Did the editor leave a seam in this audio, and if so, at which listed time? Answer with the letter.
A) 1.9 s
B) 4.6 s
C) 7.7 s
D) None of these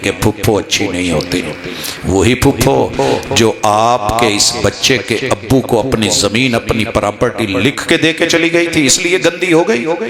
D